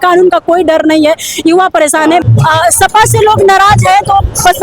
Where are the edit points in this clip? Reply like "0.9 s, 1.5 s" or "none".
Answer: 2.2 s

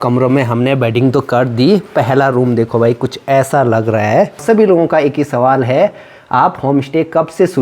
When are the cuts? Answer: 4.4 s

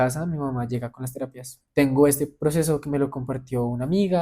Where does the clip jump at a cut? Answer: 1.5 s

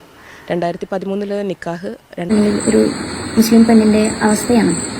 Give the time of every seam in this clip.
2.3 s

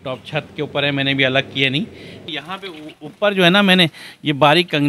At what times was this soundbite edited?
2.3 s

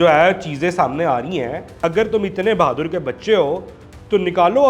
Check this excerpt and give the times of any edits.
1.7 s

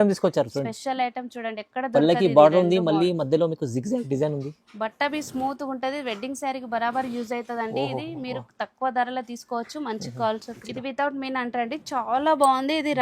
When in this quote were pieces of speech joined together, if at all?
10.5 s

